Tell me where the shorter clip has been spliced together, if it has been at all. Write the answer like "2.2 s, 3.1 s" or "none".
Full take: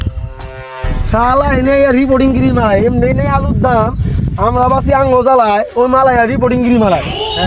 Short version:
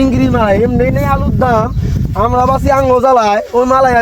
none